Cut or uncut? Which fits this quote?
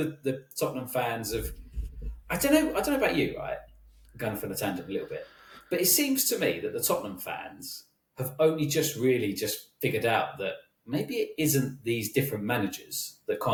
uncut